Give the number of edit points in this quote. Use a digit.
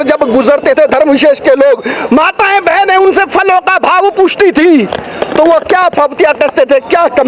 0